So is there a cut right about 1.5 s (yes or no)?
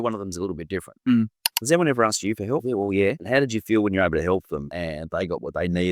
yes